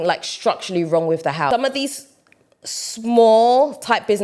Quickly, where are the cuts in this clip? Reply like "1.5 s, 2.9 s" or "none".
1.5 s